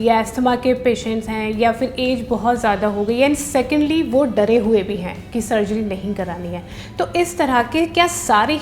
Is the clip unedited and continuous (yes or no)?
yes